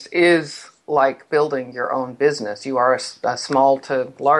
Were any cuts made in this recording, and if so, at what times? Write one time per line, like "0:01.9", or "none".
none